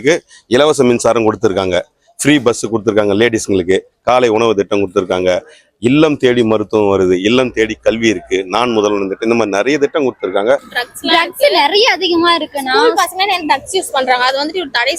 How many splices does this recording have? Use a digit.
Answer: 1